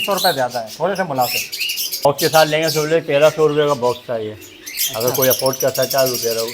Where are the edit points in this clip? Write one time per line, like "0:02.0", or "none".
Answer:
0:02.0

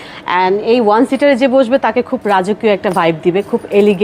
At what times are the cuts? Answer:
none

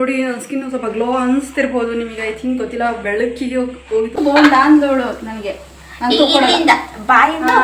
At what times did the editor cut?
0:04.2

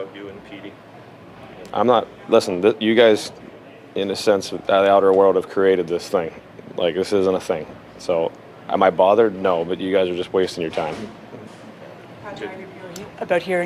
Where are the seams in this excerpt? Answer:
none

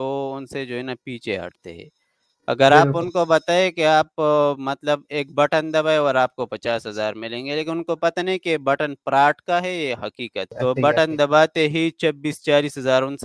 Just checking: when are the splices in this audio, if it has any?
0:10.4

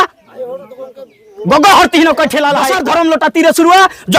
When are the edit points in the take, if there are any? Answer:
0:02.7

